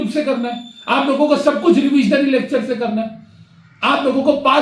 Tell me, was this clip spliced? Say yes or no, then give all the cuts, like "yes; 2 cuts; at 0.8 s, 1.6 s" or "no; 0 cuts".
no; 0 cuts